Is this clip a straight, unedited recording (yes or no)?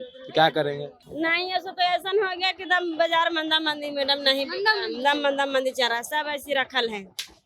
no